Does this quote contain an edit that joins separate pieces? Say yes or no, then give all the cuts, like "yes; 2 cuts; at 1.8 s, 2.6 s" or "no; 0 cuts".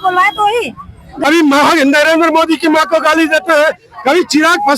yes; 1 cut; at 1.1 s